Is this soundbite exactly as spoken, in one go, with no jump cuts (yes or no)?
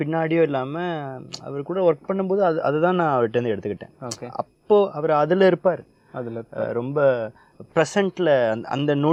yes